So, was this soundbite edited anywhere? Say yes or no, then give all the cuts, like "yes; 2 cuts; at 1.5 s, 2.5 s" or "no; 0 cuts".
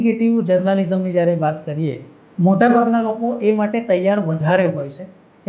yes; 1 cut; at 2.3 s